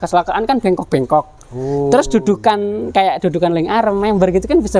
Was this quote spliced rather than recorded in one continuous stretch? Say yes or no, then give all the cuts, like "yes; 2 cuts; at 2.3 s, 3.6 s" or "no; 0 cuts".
no; 0 cuts